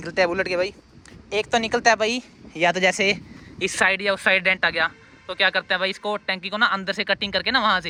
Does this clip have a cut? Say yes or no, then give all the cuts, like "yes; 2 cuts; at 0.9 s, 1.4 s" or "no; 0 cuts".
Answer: no; 0 cuts